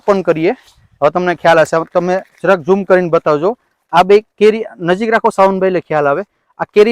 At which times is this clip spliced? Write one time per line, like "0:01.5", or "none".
none